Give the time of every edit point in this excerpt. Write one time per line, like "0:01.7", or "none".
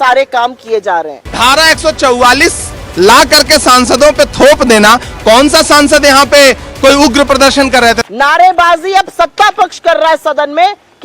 0:01.2
0:08.0